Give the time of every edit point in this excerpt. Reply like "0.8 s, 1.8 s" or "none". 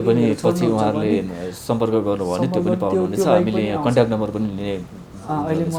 none